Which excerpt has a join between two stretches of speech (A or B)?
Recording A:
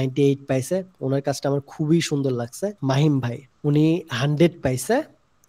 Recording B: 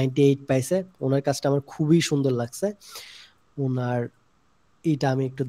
A